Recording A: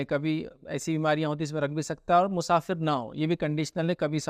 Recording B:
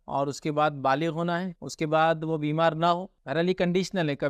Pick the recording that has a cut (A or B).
B